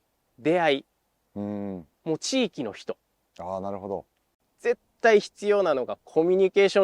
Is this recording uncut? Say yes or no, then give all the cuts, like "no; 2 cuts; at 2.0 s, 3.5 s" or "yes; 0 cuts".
no; 1 cut; at 4.3 s